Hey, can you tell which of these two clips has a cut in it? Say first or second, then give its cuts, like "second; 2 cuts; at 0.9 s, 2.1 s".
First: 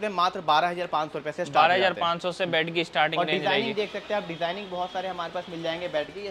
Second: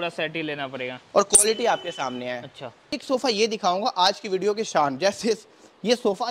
second; 1 cut; at 2.9 s